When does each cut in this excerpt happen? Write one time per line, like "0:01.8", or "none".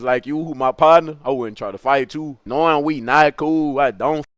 0:02.4